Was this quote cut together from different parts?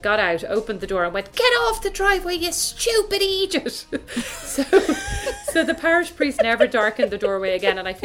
no; 0 cuts

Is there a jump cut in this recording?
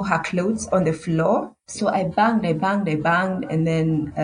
yes; 1 cut; at 1.6 s

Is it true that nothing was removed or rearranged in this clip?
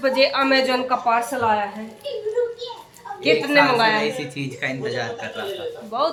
yes; 0 cuts

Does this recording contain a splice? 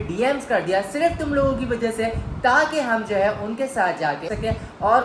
no; 0 cuts

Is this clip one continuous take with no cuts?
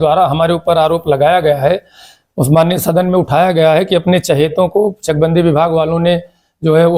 yes; 0 cuts

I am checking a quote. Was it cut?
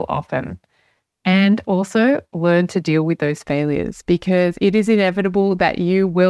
no; 0 cuts

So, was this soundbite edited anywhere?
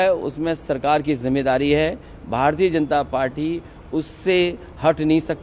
no; 0 cuts

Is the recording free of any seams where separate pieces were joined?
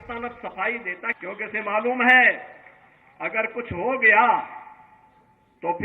no; 1 cut; at 1.2 s

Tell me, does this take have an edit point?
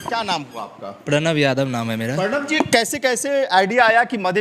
no; 0 cuts

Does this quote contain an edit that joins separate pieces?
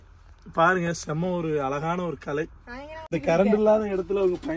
yes; 1 cut; at 2.6 s

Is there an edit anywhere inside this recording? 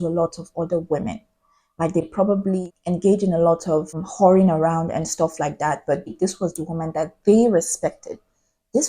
yes; 2 cuts; at 2.1 s, 6.1 s

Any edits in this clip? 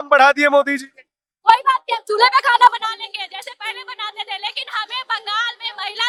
no; 0 cuts

